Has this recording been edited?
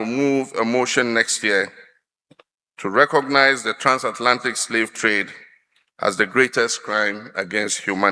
no; 0 cuts

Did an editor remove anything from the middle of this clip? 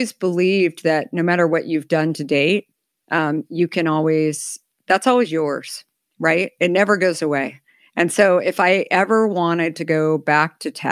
no; 0 cuts

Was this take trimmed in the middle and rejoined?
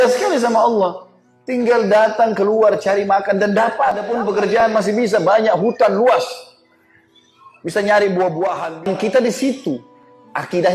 yes; 2 cuts; at 4.6 s, 8.9 s

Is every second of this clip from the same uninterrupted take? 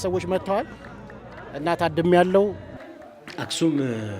no; 1 cut; at 2.7 s

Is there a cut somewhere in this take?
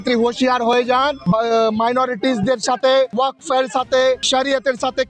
yes; 3 cuts; at 1.2 s, 3.1 s, 4.2 s

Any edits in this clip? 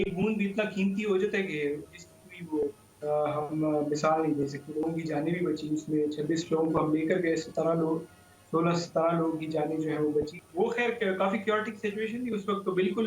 yes; 2 cuts; at 4.8 s, 10.4 s

